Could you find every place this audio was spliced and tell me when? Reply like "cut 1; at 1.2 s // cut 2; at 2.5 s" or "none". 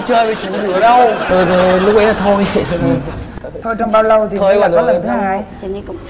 none